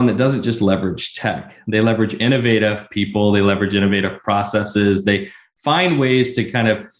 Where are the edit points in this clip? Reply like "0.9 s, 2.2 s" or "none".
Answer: none